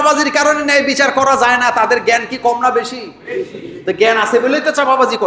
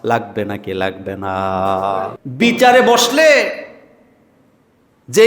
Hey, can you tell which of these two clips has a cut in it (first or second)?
second